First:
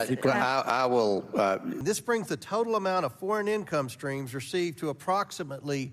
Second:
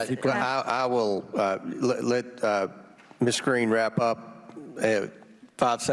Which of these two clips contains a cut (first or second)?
first